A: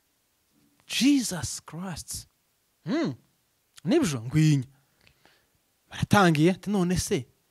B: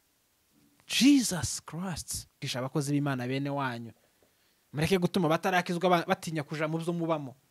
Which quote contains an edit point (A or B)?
B